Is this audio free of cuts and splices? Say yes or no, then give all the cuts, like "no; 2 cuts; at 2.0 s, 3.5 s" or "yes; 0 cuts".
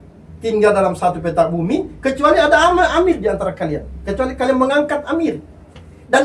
yes; 0 cuts